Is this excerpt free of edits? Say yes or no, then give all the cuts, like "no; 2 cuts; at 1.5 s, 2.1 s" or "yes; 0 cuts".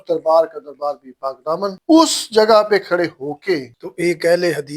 no; 1 cut; at 3.8 s